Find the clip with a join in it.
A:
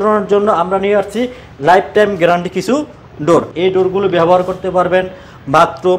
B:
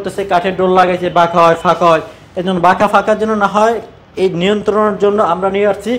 A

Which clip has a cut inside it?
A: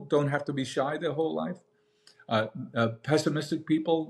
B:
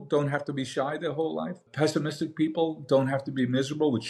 B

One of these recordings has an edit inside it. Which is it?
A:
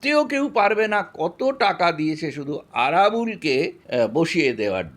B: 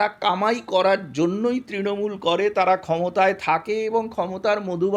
A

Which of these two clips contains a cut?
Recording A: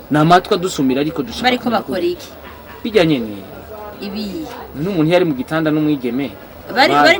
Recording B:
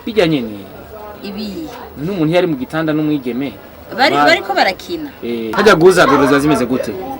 B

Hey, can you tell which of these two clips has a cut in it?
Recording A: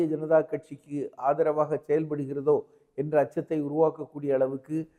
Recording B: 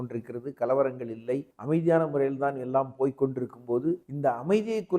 B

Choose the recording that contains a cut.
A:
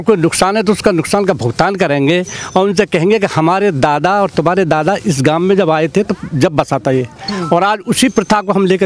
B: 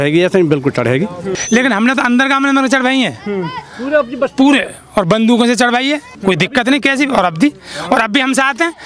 B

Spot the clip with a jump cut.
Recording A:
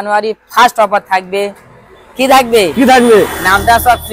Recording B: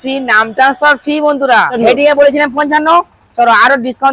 B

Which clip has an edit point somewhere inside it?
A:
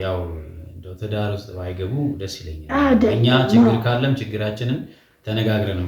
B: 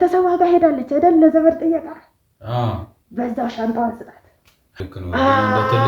B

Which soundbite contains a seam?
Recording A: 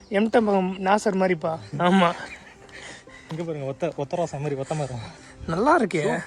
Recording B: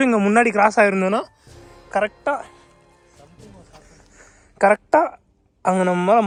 A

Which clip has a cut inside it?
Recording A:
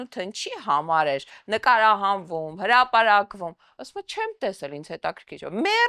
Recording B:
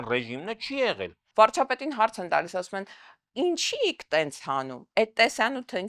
B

